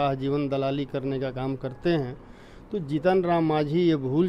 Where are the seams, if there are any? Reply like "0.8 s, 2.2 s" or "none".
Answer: none